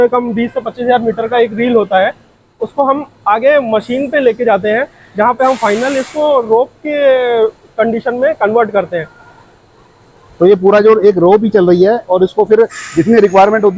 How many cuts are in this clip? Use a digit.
0